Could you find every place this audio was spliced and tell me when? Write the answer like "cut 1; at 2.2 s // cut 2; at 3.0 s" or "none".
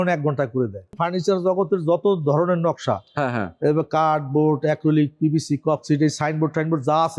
cut 1; at 0.9 s